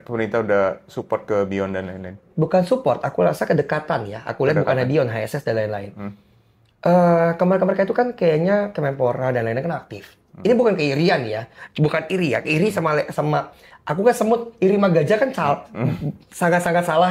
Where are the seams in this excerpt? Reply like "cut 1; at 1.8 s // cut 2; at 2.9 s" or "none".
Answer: none